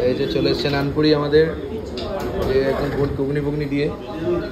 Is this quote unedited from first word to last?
yes; 0 cuts

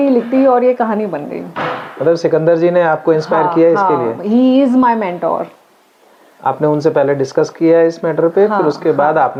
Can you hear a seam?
no; 0 cuts

